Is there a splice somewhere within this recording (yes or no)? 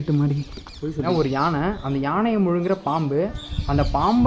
yes